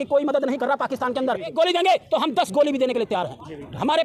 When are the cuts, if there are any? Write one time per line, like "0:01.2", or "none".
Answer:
0:01.5